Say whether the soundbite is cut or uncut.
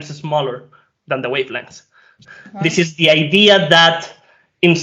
cut